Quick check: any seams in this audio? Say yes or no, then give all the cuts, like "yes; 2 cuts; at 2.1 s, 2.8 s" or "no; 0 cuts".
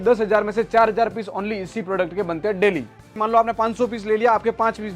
yes; 1 cut; at 3.2 s